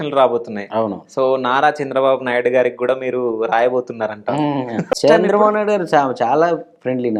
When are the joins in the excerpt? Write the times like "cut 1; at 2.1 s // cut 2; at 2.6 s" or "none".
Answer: cut 1; at 5.0 s